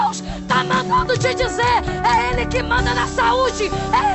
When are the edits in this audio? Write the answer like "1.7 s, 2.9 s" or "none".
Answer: none